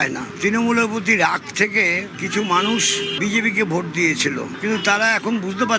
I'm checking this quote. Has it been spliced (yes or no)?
no